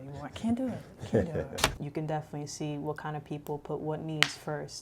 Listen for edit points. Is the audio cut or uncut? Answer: cut